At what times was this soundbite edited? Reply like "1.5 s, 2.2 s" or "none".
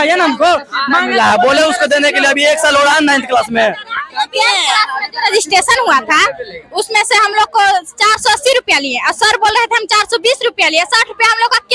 none